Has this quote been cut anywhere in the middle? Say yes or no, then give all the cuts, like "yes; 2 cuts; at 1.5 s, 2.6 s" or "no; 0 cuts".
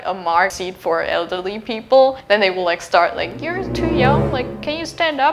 no; 0 cuts